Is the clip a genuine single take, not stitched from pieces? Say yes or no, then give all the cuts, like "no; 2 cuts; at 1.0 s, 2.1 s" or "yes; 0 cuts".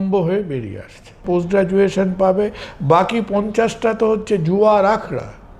no; 1 cut; at 1.2 s